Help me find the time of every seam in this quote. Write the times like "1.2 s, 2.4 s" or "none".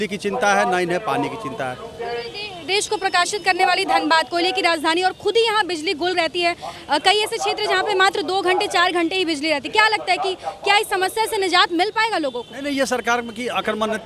none